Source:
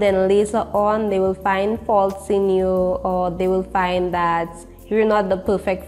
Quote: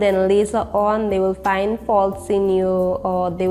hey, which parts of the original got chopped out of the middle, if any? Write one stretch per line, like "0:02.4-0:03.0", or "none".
none